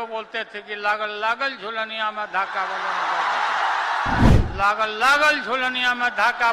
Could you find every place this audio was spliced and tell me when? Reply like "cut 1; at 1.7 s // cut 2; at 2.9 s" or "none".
cut 1; at 4.3 s